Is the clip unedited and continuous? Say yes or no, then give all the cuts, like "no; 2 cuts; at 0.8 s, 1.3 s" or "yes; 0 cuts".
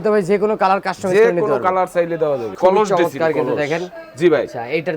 no; 1 cut; at 2.5 s